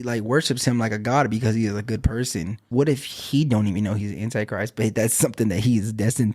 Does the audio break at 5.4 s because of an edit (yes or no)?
no